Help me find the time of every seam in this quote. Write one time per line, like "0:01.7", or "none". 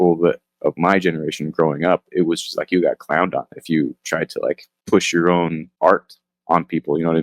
0:04.7
0:05.7